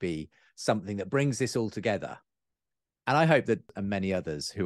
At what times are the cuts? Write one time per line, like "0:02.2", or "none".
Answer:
0:03.6

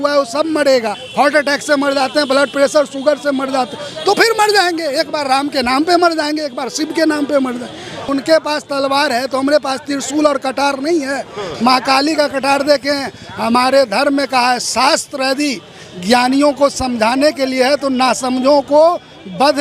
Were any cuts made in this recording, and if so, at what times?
0:01.0
0:08.0

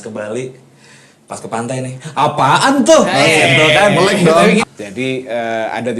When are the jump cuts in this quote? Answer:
0:04.7

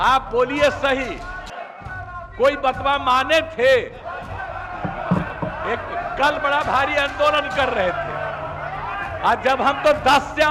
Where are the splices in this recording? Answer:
none

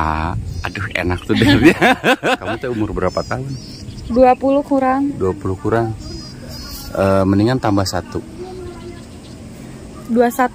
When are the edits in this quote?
0:02.5

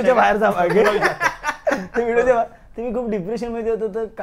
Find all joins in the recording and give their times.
none

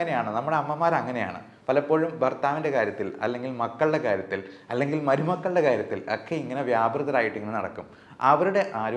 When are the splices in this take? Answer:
none

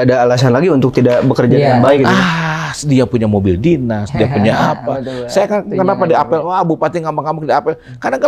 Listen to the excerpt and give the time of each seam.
none

